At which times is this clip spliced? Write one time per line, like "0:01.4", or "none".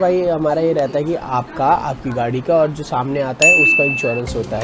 none